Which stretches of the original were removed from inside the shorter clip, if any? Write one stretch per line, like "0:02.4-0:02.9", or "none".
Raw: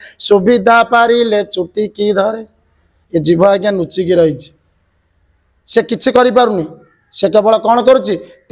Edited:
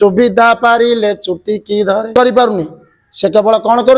0:02.4-0:06.1